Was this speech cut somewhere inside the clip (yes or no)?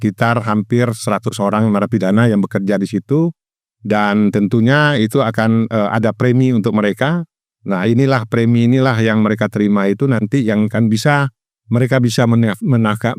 no